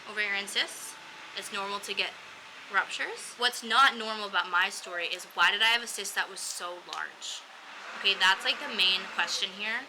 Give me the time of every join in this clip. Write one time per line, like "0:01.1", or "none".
0:03.4